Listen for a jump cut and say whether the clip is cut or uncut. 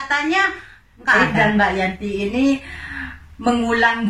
cut